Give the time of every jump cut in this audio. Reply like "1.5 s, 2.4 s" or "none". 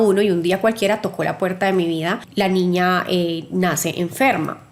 2.2 s

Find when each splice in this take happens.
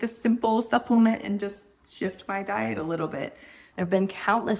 3.6 s

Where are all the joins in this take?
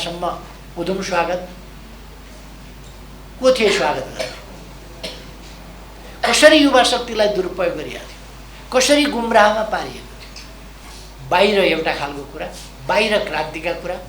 10.9 s

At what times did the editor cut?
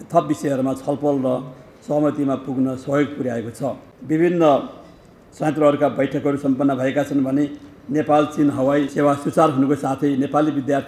3.9 s, 8.9 s

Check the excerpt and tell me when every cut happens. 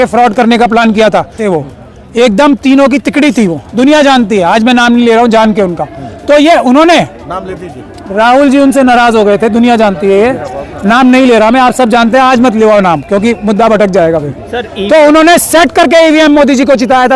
1.4 s

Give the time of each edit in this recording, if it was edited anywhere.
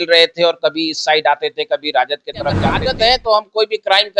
2.7 s

